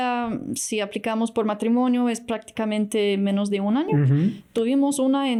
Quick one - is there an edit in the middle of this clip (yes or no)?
no